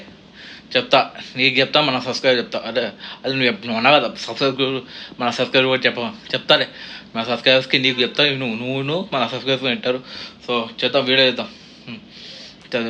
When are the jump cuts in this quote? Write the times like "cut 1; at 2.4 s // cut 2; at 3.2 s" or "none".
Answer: none